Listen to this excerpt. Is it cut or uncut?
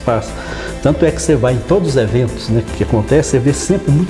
uncut